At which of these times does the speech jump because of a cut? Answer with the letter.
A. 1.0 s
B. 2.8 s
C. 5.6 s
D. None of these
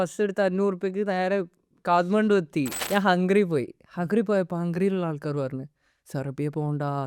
B